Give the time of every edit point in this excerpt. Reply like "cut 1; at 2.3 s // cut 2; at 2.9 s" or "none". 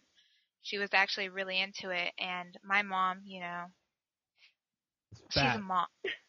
none